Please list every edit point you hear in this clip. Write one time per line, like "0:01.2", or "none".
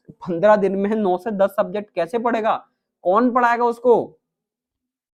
none